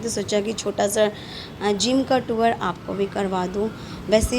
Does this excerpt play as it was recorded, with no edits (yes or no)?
yes